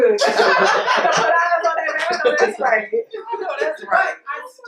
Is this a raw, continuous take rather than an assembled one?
yes; 0 cuts

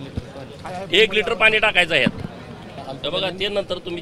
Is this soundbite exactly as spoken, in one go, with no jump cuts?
no; 1 cut; at 2.8 s

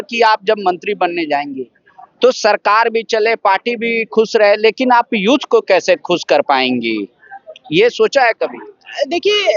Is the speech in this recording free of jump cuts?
yes; 0 cuts

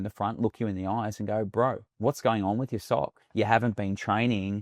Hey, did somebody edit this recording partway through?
yes; 2 cuts; at 1.9 s, 3.2 s

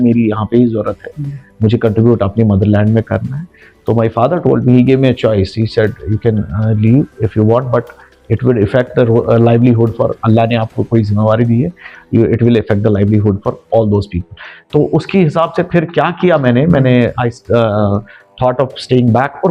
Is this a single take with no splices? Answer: yes; 0 cuts

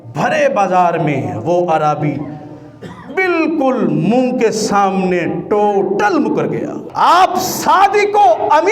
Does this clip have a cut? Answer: yes; 1 cut; at 6.8 s

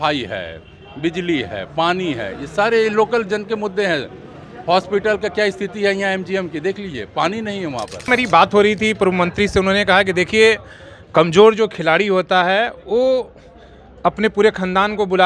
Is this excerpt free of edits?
no; 1 cut; at 8.1 s

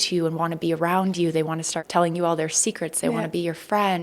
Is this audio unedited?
no; 1 cut; at 1.8 s

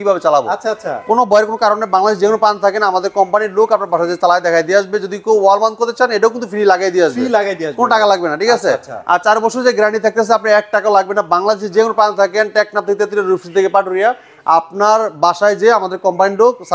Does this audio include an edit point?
no; 0 cuts

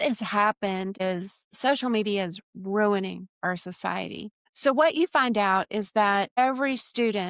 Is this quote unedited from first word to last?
no; 3 cuts; at 1.2 s, 4.4 s, 6.3 s

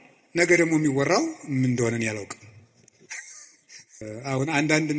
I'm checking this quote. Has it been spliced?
yes; 1 cut; at 4.1 s

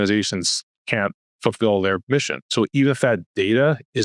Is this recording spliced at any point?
yes; 2 cuts; at 1.3 s, 2.5 s

